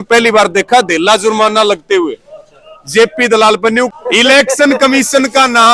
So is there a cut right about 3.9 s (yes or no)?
yes